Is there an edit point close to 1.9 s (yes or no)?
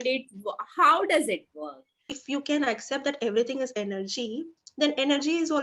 yes